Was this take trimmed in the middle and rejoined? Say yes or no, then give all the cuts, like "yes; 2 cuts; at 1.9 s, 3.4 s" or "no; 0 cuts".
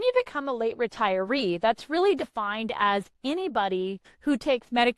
yes; 1 cut; at 4.1 s